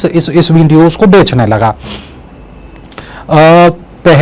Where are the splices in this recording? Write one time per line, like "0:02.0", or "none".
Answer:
none